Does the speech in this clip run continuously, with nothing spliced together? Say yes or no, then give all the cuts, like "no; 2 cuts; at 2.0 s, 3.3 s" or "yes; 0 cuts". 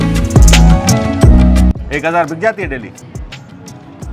no; 1 cut; at 1.7 s